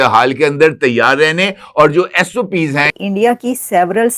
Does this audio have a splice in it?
yes; 1 cut; at 2.9 s

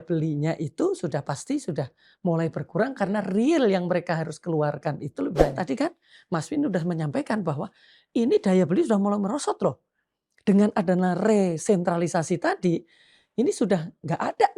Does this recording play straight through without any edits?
no; 1 cut; at 5.6 s

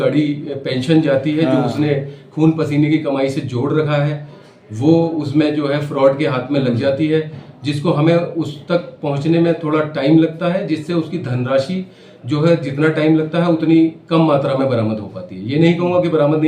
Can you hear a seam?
no; 0 cuts

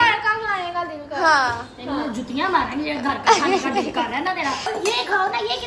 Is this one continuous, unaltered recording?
no; 1 cut; at 4.6 s

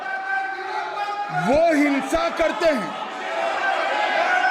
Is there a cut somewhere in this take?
no; 0 cuts

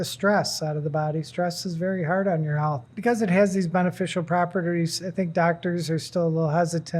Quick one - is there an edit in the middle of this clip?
yes; 1 cut; at 2.9 s

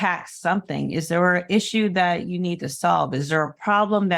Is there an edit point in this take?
no; 0 cuts

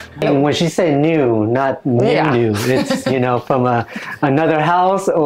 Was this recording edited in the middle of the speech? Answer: no; 0 cuts

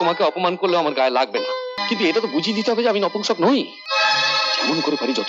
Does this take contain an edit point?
yes; 2 cuts; at 1.8 s, 3.8 s

